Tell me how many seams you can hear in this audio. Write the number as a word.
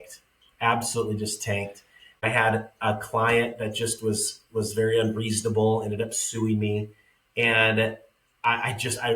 one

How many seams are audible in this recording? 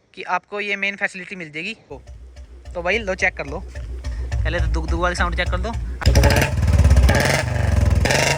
two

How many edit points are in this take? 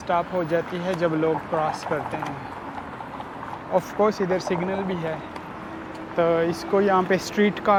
zero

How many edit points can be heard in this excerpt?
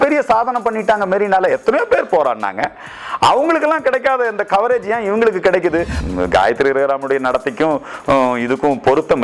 one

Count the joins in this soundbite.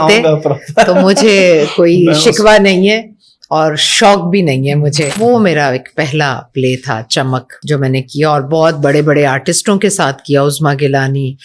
two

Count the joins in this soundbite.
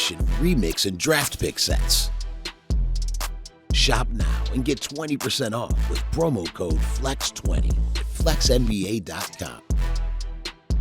one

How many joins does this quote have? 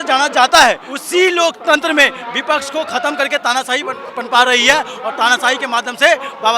one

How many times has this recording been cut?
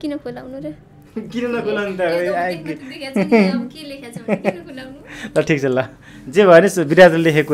zero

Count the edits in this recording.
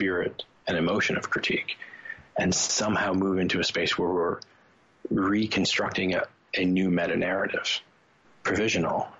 one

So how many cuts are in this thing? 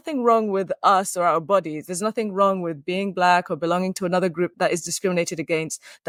zero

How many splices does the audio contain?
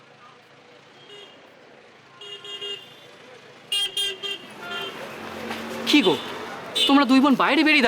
one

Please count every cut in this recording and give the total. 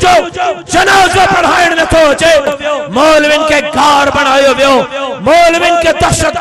one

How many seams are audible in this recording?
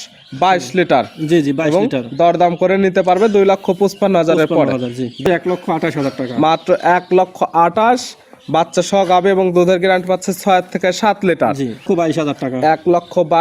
two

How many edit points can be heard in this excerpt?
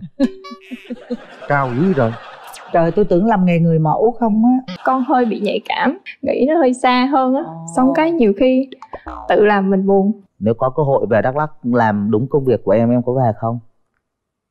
three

